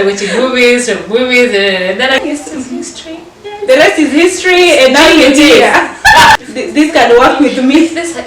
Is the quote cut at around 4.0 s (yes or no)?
no